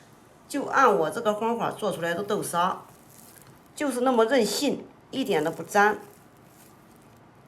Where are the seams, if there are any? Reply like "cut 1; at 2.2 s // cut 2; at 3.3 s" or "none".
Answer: cut 1; at 5.0 s